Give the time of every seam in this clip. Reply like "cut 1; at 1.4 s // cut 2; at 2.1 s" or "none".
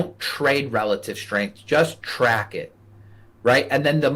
none